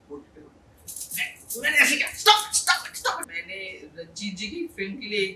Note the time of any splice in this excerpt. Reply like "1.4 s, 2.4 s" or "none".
3.3 s